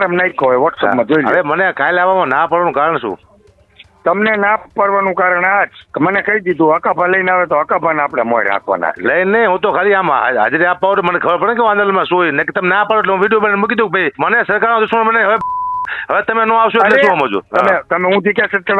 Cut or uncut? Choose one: cut